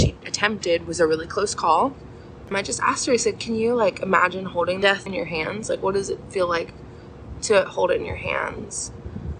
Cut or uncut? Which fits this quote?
cut